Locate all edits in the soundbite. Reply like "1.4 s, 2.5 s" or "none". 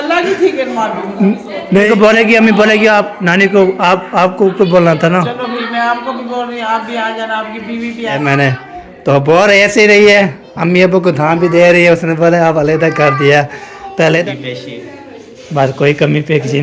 1.9 s, 8.2 s, 14.2 s

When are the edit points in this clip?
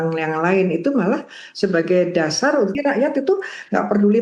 2.7 s

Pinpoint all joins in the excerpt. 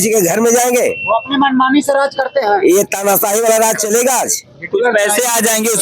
none

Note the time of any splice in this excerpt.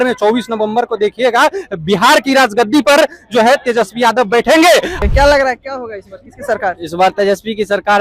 5.0 s

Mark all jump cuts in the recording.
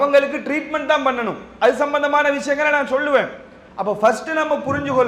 none

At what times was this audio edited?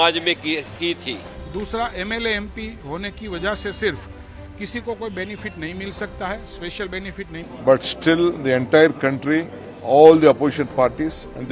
1.3 s, 7.5 s

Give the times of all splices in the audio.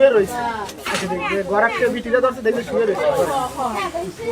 none

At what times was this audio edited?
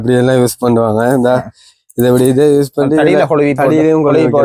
none

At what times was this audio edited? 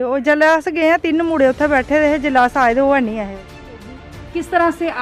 4.0 s

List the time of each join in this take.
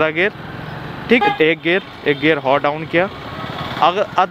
1.2 s

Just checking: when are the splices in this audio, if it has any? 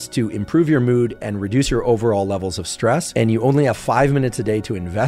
3.1 s

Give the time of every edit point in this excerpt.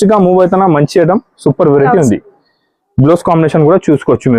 none

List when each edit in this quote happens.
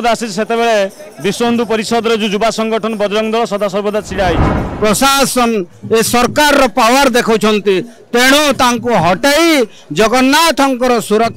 4.6 s

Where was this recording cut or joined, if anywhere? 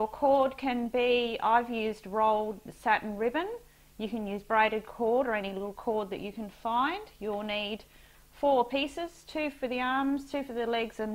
8.2 s

